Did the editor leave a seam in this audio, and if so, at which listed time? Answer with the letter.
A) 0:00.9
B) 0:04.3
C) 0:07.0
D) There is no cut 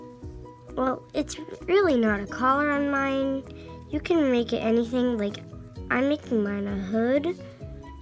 D